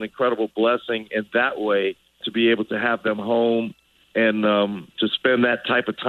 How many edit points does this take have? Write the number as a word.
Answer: two